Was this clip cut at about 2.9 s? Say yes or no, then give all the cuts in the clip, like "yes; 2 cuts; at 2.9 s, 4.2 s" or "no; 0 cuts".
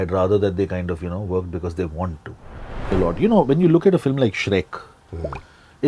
yes; 1 cut; at 2.9 s